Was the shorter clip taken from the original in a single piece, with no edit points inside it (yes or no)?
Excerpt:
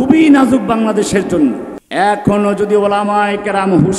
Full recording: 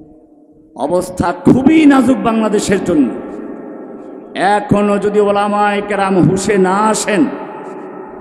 no